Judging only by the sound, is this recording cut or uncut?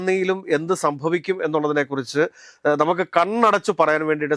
uncut